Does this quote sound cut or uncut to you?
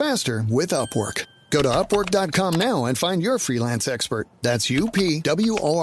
uncut